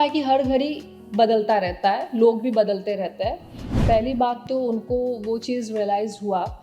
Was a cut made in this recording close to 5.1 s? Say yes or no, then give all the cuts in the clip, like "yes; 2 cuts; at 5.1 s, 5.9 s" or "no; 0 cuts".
no; 1 cut; at 3.7 s